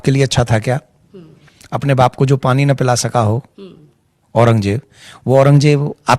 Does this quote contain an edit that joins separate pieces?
no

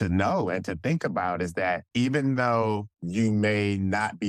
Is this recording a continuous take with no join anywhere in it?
no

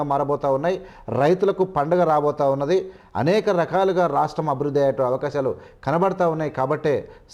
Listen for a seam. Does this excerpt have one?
no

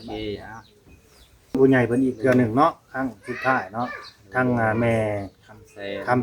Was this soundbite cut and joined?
yes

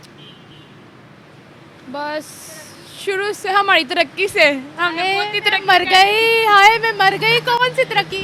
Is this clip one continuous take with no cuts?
yes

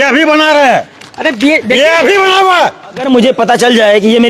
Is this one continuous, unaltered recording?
no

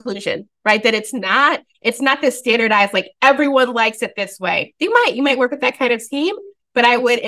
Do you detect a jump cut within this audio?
no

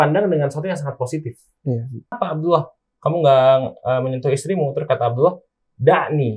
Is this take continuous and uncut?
no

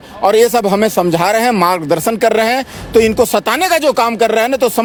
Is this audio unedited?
yes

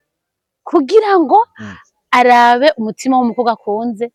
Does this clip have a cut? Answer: no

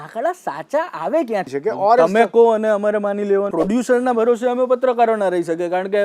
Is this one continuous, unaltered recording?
no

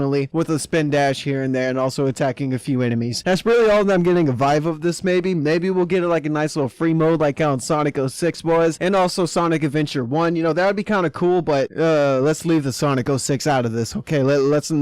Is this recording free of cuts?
no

